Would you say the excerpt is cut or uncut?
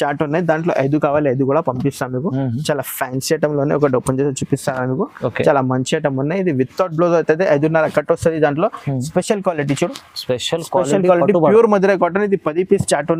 uncut